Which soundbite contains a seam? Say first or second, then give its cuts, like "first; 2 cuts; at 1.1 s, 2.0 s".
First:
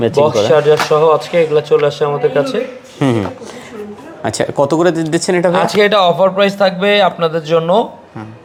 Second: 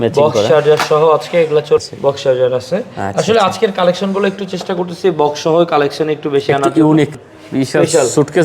second; 2 cuts; at 1.8 s, 7.1 s